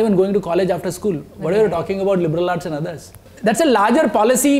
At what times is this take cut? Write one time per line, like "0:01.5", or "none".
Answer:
0:03.2